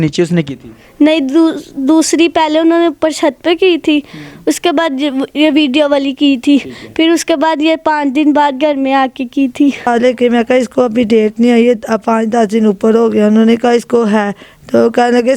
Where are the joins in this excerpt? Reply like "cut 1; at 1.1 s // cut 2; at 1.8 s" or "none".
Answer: cut 1; at 9.9 s